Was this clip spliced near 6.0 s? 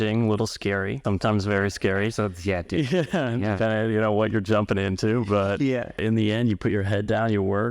yes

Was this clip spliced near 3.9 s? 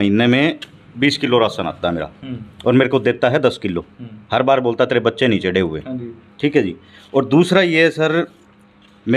no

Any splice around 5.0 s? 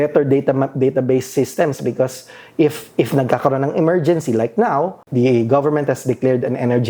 yes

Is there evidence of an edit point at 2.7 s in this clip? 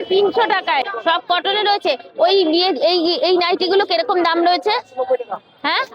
no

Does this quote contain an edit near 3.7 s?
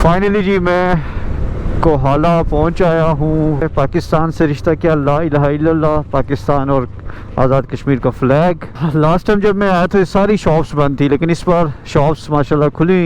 yes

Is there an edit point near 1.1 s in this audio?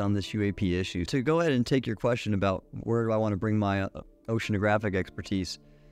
yes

